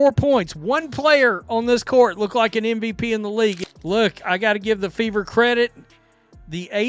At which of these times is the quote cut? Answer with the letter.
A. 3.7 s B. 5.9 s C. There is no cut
A